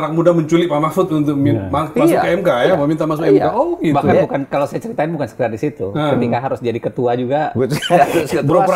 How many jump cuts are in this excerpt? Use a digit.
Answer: 0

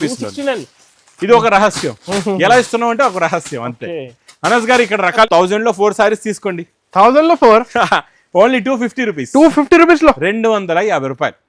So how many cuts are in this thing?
1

